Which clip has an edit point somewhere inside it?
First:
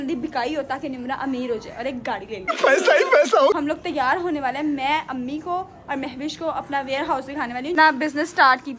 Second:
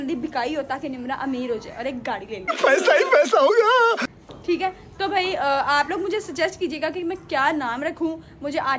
first; 2 cuts; at 3.5 s, 7.8 s

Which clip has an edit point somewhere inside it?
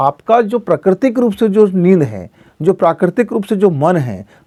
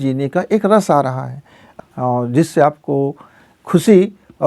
second; 1 cut; at 1.7 s

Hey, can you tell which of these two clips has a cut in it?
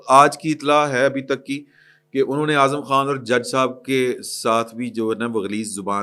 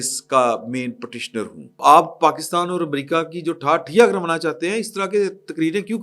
second; 1 cut; at 1.8 s

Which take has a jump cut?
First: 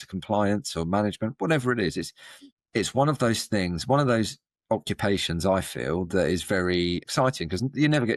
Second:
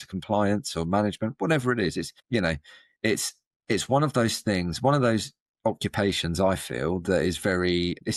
first; 2 cuts; at 2.3 s, 7.1 s

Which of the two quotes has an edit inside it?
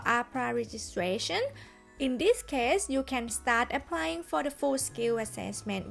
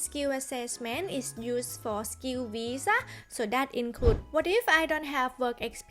second; 1 cut; at 4.2 s

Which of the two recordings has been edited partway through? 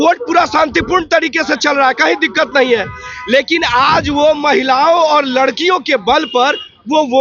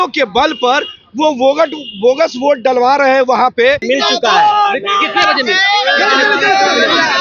second; 1 cut; at 3.8 s

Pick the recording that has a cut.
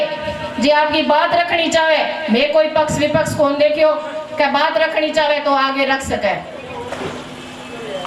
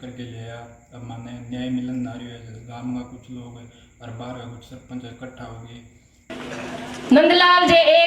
second; 1 cut; at 6.3 s

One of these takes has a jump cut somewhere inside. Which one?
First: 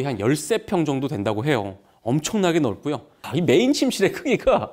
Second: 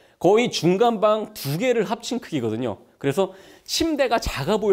first; 1 cut; at 3.2 s

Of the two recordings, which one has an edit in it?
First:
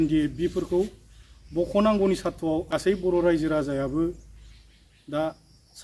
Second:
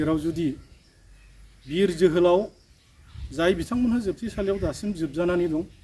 first; 1 cut; at 2.8 s

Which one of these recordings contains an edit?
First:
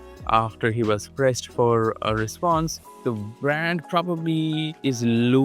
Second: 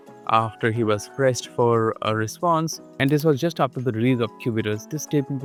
first; 1 cut; at 3.0 s

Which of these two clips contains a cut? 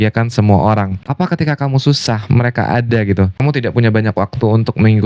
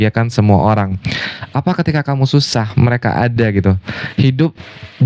first; 2 cuts; at 1.0 s, 3.4 s

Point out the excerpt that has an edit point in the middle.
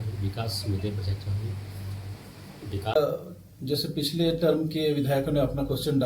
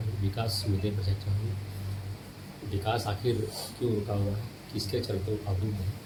first; 1 cut; at 3.0 s

